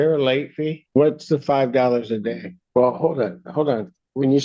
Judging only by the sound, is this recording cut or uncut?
cut